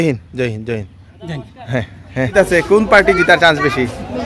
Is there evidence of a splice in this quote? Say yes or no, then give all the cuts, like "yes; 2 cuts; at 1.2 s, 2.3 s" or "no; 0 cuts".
yes; 1 cut; at 2.3 s